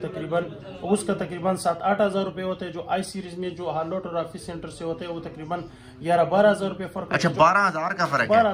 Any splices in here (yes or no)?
no